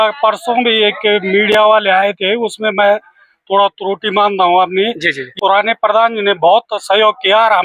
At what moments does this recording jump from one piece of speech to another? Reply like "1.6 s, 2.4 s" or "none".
5.3 s

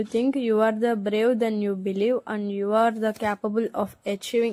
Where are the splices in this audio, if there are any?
none

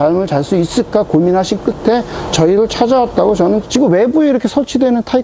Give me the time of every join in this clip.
3.7 s

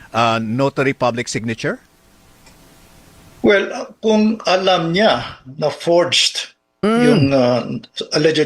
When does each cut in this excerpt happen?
5.8 s

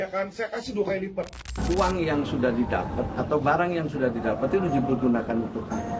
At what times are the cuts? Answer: 1.5 s

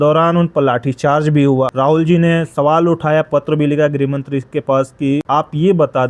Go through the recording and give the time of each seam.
1.7 s, 5.2 s

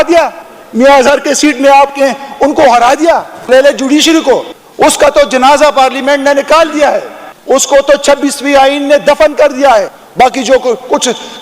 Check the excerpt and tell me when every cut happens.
3.5 s

